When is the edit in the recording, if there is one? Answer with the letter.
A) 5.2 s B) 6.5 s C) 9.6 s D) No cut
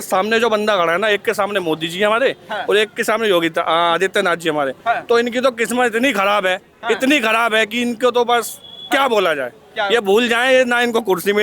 D